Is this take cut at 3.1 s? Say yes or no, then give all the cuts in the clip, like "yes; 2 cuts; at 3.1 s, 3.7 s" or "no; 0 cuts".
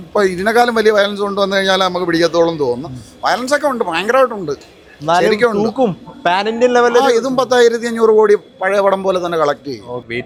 no; 0 cuts